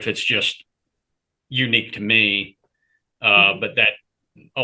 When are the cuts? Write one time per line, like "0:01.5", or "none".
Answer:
none

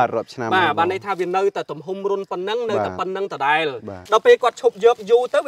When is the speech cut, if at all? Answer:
0:04.0

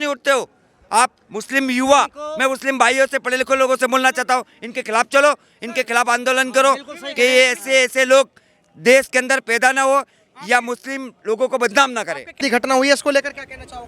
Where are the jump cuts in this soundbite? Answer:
0:12.4

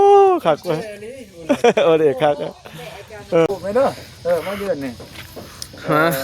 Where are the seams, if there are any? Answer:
0:03.5

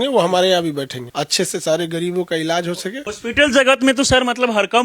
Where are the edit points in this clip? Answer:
0:01.0
0:03.1

